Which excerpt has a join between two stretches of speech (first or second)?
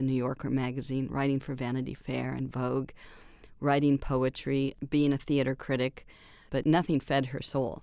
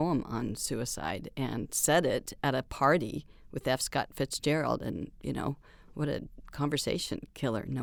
first